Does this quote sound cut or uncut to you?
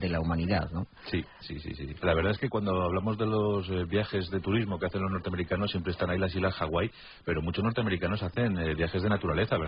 uncut